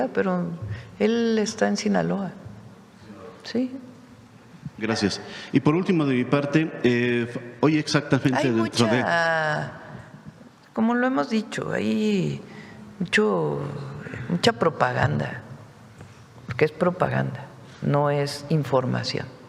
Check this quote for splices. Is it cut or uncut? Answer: uncut